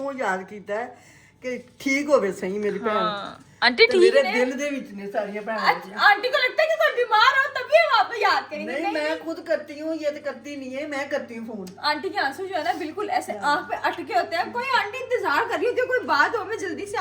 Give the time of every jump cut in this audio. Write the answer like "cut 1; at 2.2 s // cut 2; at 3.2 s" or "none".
none